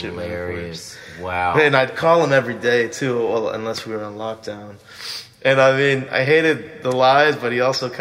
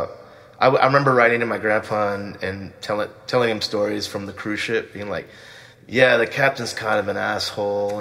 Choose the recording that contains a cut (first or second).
first